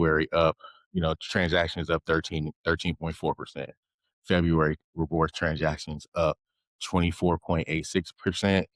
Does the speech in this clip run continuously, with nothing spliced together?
yes; 0 cuts

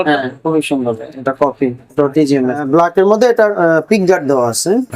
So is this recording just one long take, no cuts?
no; 1 cut; at 2.6 s

